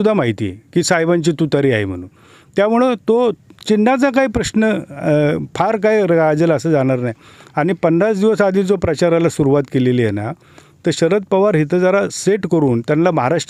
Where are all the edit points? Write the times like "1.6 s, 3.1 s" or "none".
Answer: none